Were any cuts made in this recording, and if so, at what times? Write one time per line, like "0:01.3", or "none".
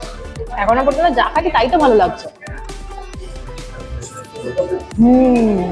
none